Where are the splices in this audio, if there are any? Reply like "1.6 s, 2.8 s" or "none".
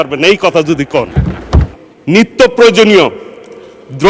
1.6 s